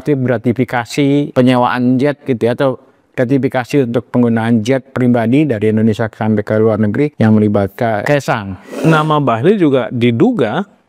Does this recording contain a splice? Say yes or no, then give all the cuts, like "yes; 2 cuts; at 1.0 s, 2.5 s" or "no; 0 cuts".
yes; 3 cuts; at 1.3 s, 7.1 s, 8.1 s